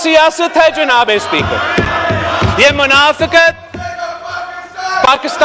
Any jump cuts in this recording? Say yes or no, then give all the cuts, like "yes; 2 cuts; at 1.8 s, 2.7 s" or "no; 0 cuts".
no; 0 cuts